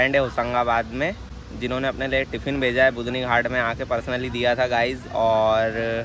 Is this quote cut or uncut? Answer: uncut